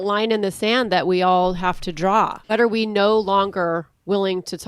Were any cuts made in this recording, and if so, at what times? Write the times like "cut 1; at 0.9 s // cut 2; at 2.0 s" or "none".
cut 1; at 2.4 s